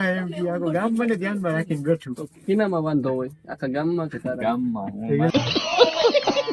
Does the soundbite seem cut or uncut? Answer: cut